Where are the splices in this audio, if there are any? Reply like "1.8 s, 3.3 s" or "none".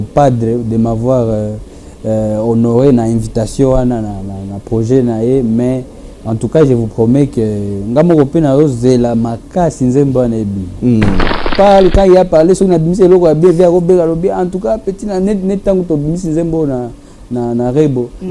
11.5 s